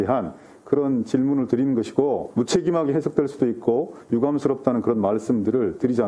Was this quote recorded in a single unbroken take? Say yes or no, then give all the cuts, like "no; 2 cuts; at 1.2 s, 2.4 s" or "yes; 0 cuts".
no; 1 cut; at 2.3 s